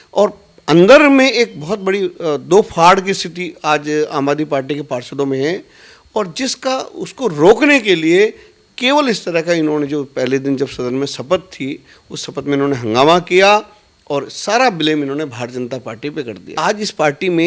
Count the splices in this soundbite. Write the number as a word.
one